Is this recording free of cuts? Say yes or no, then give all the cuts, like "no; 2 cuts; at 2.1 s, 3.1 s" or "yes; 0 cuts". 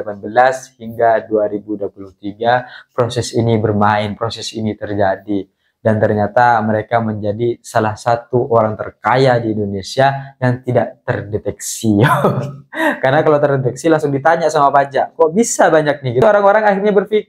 no; 1 cut; at 16.2 s